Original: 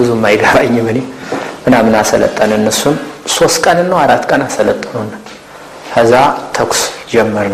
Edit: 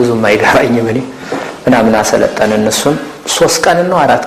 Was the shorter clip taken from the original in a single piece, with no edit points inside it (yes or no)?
yes